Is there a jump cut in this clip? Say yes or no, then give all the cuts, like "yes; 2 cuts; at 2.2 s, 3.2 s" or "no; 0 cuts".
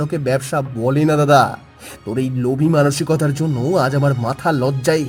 no; 0 cuts